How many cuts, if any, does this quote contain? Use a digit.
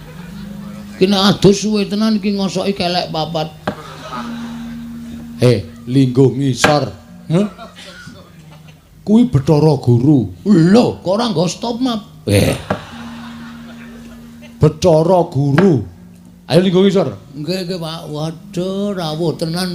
0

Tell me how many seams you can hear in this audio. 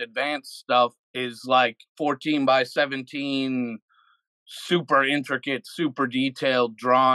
2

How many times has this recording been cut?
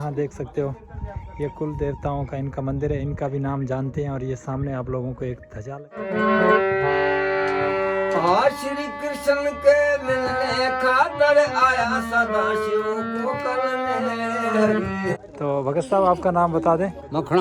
2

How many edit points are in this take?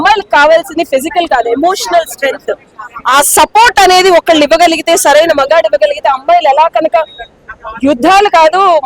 1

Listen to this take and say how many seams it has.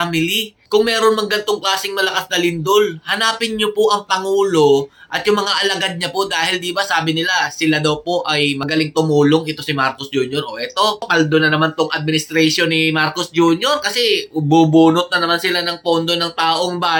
0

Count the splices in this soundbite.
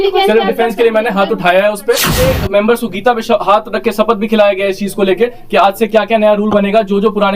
1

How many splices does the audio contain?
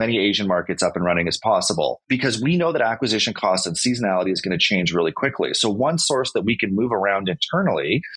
0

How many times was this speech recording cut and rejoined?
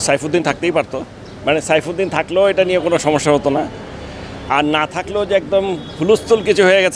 0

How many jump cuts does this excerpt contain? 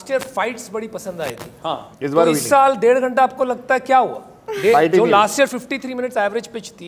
0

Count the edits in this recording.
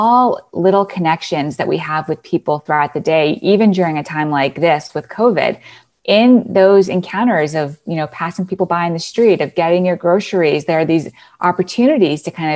1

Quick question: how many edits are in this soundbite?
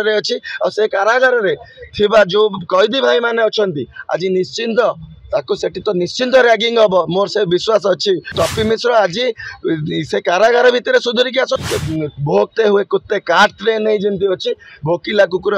2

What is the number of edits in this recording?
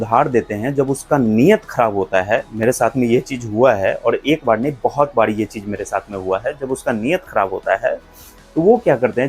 0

